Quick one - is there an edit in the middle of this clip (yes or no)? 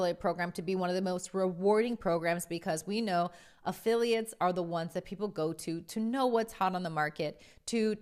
no